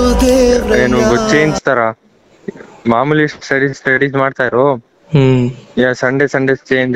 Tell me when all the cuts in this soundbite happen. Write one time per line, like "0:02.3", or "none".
none

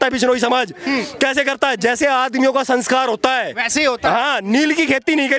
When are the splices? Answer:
none

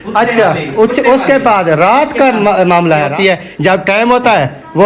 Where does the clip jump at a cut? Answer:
0:03.4

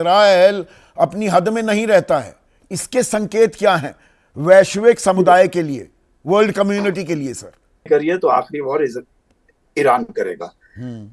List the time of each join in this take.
0:07.9

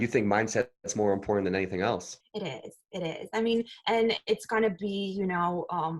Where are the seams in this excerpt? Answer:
0:02.2

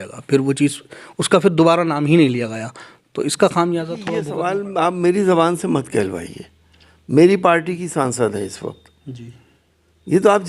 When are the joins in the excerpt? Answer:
0:04.4

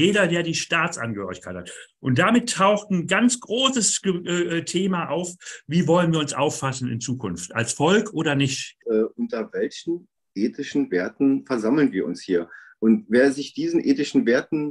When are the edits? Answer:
0:08.8

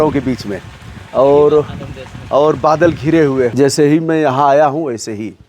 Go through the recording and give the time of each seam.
0:03.5

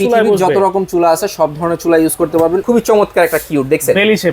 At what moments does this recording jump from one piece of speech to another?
0:02.6

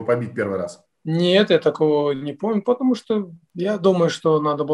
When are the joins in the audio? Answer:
0:03.3

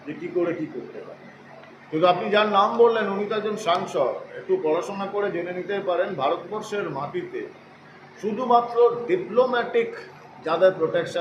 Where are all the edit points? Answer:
none

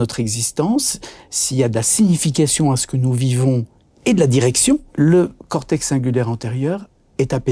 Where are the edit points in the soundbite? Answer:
0:04.9

